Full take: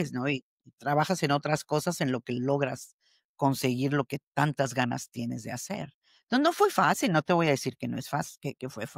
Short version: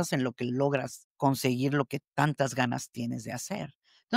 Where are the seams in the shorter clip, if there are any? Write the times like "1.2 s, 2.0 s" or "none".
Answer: 1.0 s